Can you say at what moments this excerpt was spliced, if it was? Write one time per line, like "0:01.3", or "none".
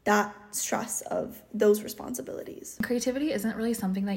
0:02.8